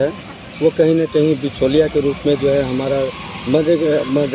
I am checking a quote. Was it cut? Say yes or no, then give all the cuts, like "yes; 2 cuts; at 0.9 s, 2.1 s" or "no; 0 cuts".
no; 0 cuts